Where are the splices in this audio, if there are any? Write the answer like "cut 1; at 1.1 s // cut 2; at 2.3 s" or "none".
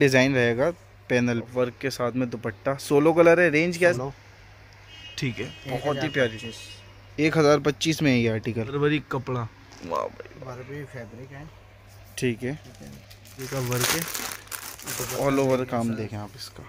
cut 1; at 1.5 s // cut 2; at 4.0 s // cut 3; at 8.7 s // cut 4; at 13.4 s